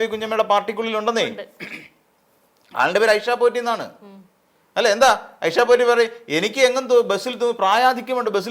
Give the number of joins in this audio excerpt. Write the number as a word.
zero